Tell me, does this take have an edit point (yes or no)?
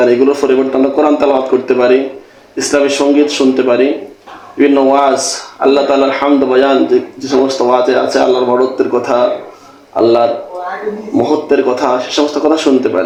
no